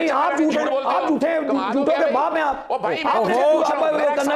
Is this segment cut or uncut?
uncut